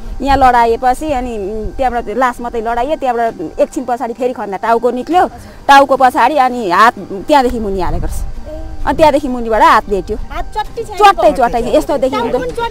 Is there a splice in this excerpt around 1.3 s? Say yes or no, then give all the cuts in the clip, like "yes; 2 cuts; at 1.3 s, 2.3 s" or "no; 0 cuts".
no; 0 cuts